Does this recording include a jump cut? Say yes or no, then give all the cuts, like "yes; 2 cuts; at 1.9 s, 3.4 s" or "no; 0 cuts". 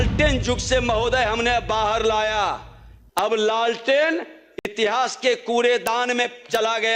no; 0 cuts